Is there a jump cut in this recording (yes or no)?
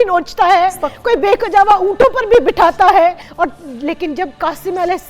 yes